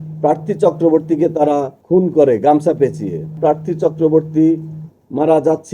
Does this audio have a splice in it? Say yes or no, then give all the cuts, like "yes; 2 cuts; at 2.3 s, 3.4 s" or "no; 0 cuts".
yes; 2 cuts; at 1.8 s, 3.3 s